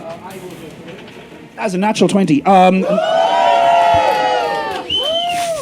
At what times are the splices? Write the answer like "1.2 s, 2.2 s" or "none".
1.6 s